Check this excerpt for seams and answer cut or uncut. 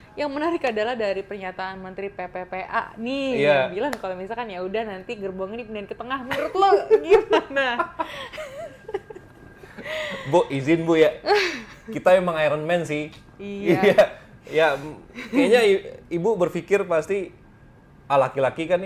uncut